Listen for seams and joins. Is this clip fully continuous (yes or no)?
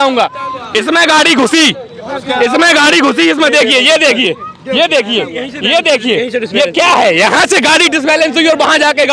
yes